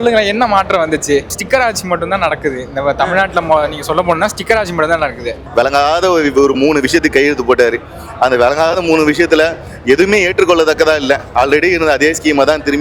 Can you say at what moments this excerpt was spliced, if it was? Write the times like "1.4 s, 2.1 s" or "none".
5.5 s